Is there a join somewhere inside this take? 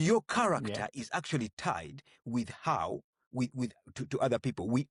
no; 0 cuts

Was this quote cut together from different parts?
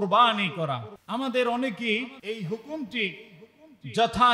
yes; 2 cuts; at 0.9 s, 2.2 s

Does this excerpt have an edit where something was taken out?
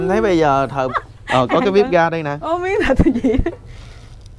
yes; 1 cut; at 1.0 s

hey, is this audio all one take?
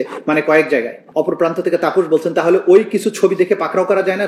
no; 1 cut; at 1.0 s

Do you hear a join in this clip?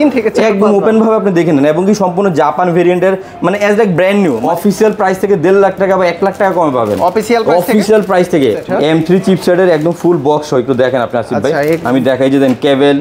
yes; 2 cuts; at 4.4 s, 8.6 s

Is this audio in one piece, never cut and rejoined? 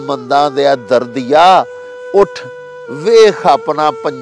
yes; 0 cuts

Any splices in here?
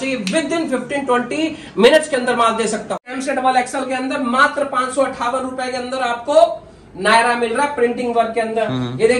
yes; 1 cut; at 3.1 s

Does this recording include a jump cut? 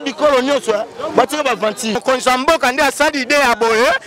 yes; 1 cut; at 1.9 s

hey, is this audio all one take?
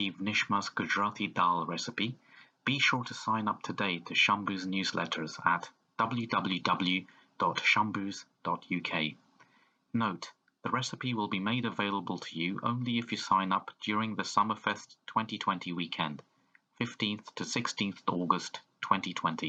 yes; 0 cuts

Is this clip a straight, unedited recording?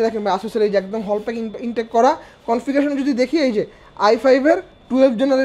yes; 0 cuts

